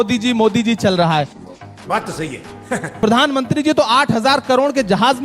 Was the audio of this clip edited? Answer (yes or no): yes